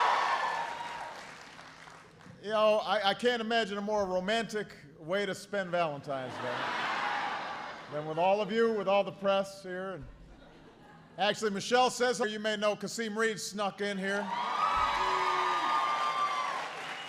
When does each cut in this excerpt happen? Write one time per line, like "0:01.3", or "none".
none